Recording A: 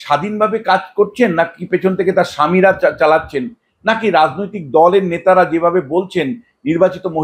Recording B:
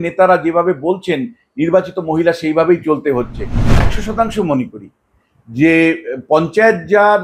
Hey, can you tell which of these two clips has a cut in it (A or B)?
B